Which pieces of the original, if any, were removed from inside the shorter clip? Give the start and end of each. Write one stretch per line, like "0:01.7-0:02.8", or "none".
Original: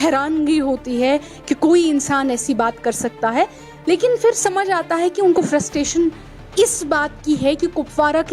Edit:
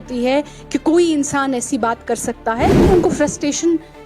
0:03.6-0:05.1